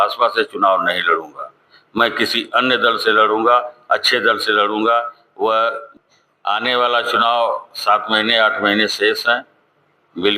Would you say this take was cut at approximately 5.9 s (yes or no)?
yes